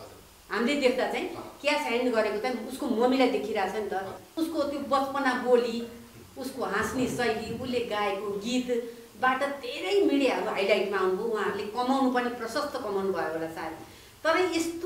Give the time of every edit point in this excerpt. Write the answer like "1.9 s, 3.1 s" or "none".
4.2 s